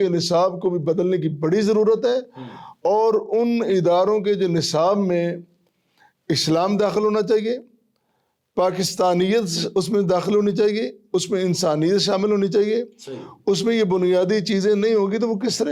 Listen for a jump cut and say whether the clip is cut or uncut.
uncut